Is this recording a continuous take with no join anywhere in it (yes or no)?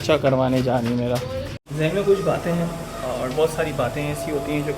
no